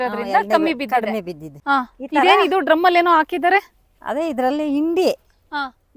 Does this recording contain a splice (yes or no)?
yes